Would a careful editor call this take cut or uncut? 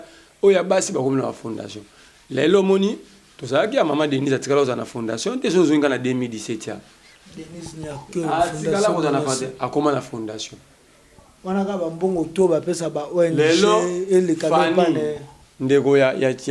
uncut